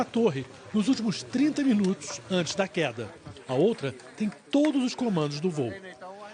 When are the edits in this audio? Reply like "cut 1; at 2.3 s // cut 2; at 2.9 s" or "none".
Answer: cut 1; at 4.2 s